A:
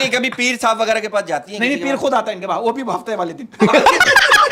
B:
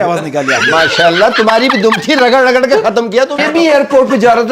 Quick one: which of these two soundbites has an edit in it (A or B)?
B